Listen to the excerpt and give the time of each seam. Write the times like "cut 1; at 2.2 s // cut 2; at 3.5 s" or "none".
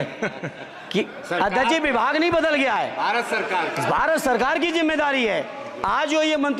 none